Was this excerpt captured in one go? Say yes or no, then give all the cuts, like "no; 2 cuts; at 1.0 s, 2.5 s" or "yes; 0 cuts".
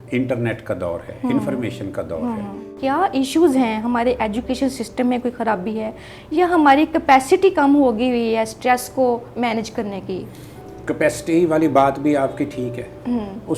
no; 1 cut; at 2.7 s